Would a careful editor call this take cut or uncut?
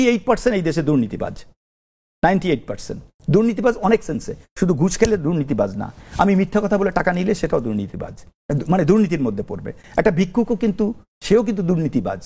uncut